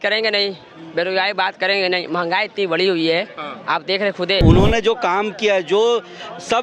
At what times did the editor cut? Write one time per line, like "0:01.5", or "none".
0:04.4